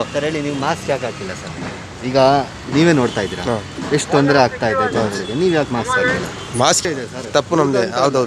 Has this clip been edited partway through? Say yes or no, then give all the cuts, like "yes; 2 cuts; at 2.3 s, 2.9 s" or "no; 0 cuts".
yes; 1 cut; at 6.9 s